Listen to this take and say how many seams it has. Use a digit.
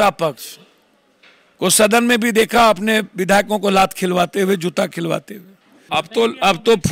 1